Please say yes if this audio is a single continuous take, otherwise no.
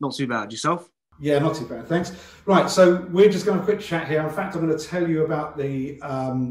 yes